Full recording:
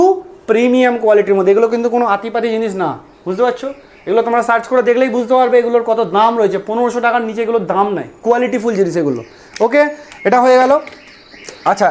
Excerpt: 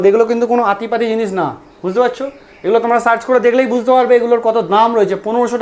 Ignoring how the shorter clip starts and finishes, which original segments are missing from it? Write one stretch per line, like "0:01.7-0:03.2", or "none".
none